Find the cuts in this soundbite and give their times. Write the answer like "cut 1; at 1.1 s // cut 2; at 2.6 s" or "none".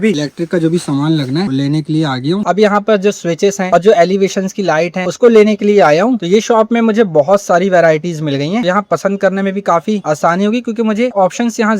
cut 1; at 2.4 s